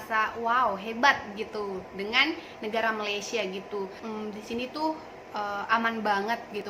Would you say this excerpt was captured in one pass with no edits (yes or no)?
no